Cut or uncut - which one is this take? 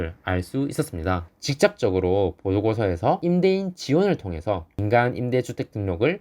cut